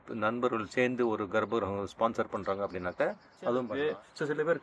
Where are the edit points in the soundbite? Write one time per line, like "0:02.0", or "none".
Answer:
0:03.7

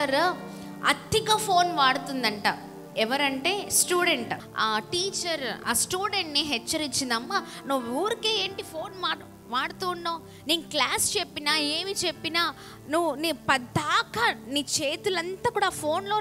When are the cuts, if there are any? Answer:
0:04.5
0:05.6

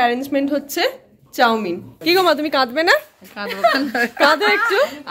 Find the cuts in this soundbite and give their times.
0:01.9

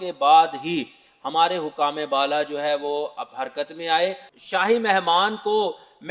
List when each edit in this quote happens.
0:04.3

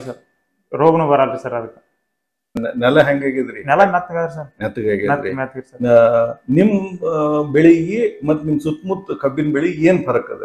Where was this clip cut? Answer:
0:02.6

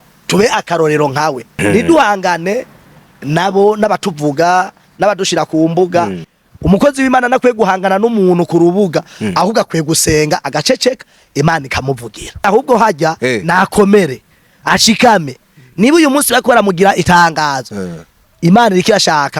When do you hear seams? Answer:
0:01.6
0:06.3
0:12.4

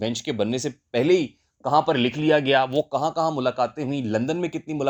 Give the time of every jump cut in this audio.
none

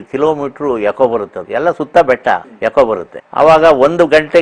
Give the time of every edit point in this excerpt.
0:01.4
0:02.5
0:03.2

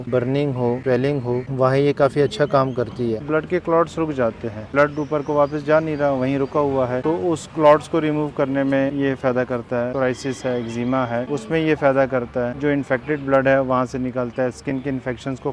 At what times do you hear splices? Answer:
0:03.2
0:04.7
0:08.9
0:09.9
0:12.5

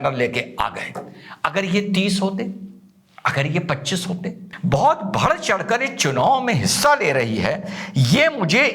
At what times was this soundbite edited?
0:04.5

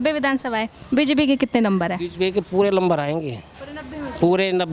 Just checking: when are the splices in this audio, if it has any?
none

